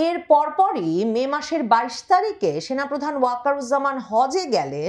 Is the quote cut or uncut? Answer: uncut